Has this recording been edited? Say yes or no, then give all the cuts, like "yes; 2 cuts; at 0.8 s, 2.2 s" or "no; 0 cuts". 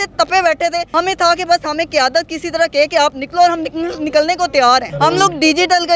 yes; 2 cuts; at 0.9 s, 4.9 s